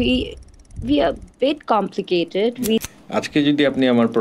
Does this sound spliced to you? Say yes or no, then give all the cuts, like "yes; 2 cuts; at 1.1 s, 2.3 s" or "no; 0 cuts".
yes; 1 cut; at 3.0 s